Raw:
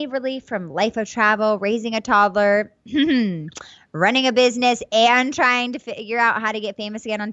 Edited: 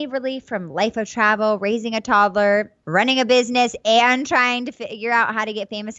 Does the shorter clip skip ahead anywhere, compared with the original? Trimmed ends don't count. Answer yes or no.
yes